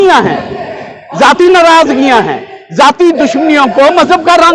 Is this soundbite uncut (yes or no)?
yes